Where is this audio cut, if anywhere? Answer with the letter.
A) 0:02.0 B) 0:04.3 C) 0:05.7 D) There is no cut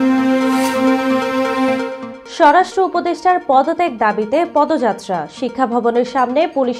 D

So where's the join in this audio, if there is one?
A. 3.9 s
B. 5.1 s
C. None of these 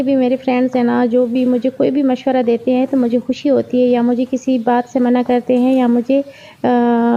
C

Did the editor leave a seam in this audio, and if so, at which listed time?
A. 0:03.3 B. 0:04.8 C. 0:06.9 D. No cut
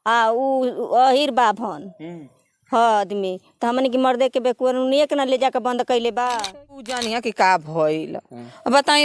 C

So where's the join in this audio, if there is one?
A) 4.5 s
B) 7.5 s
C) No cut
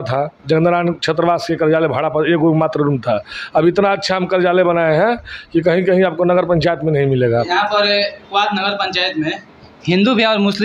B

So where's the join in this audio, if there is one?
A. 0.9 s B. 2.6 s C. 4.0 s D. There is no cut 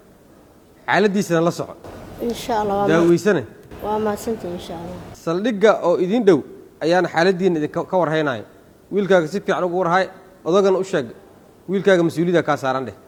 D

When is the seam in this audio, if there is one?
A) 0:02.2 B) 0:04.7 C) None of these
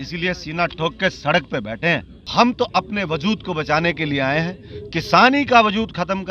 A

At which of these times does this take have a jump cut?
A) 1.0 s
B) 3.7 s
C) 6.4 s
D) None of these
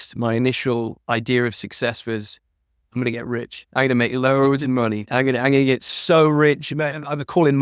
A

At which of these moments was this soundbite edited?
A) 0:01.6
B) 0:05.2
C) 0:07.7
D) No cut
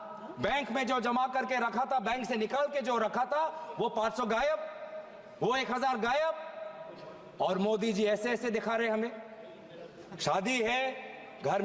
D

